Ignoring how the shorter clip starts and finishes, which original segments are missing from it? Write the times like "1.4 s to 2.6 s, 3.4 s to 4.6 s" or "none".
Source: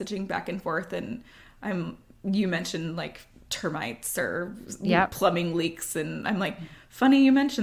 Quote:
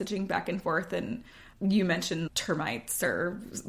1.4 s to 2.0 s, 2.9 s to 3.4 s